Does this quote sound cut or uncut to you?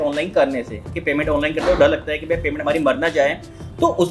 uncut